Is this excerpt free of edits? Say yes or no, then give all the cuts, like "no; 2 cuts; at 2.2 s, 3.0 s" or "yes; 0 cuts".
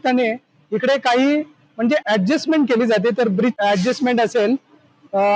no; 1 cut; at 3.6 s